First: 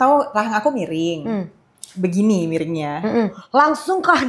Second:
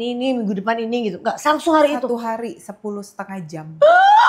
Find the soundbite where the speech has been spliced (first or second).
first